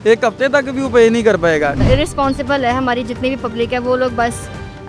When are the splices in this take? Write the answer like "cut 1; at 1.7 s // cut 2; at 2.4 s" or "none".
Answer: cut 1; at 1.8 s